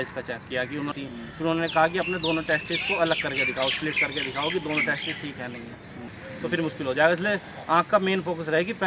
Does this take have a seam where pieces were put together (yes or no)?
yes